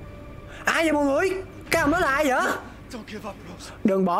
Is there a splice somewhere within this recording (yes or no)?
yes